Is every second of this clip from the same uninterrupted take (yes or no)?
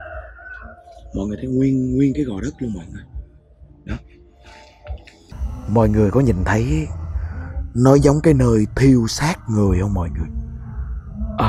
no